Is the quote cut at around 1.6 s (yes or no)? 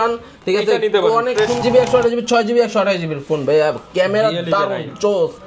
yes